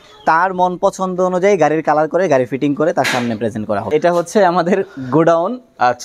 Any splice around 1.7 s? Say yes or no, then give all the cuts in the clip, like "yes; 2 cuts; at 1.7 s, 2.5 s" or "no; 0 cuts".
no; 1 cut; at 3.9 s